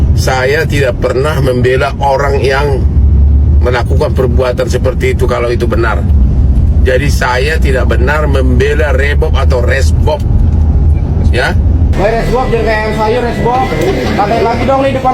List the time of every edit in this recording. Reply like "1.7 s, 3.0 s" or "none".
11.9 s

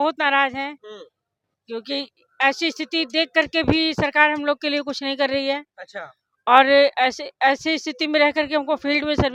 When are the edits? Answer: none

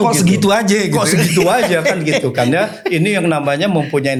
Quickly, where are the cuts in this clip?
none

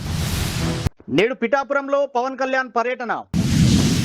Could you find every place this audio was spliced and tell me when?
none

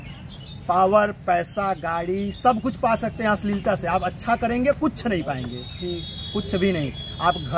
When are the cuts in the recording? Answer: none

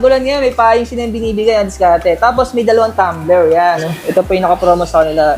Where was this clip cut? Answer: 3.9 s

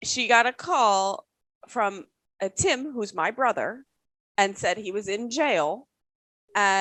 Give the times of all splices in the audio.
none

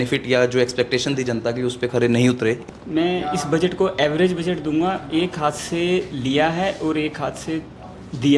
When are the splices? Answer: 2.7 s

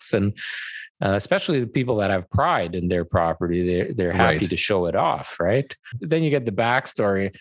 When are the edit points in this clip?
5.9 s

